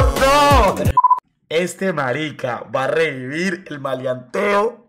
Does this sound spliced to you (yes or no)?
yes